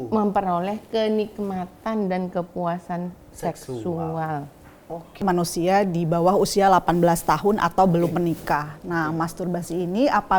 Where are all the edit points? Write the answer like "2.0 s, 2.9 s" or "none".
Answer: 5.2 s